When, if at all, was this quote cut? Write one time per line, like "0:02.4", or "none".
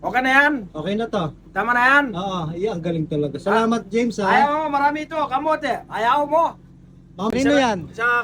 0:07.3